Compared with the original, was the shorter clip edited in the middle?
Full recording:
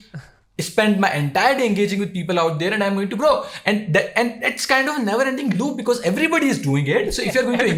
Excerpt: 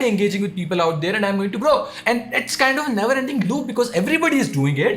yes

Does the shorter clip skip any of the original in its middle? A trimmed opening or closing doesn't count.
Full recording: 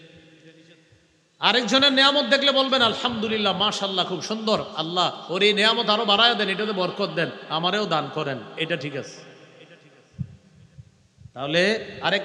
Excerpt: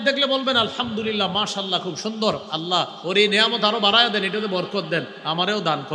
no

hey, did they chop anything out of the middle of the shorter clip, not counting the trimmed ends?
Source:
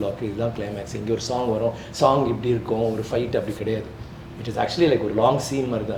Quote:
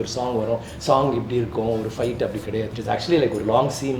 yes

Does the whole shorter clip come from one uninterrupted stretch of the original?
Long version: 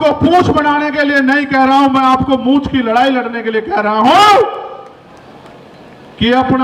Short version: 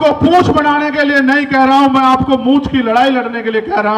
yes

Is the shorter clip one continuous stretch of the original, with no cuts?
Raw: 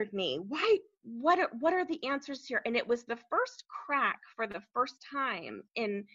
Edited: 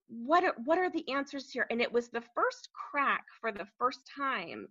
yes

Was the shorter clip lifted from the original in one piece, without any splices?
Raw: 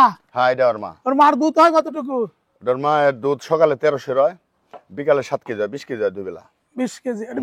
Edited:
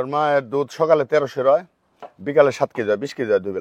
yes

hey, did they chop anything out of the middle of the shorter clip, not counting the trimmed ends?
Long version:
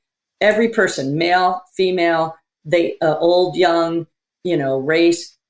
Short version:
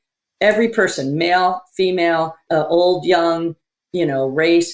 yes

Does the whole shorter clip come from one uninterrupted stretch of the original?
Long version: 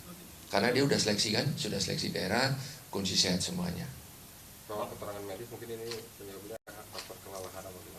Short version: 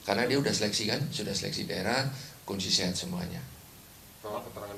yes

